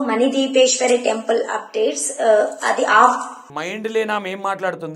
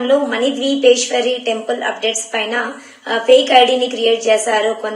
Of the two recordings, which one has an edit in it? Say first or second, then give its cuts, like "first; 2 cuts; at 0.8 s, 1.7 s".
first; 1 cut; at 3.4 s